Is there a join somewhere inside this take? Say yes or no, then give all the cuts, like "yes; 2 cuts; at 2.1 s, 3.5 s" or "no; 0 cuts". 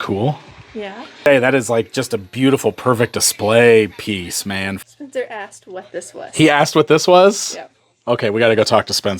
yes; 2 cuts; at 1.2 s, 4.8 s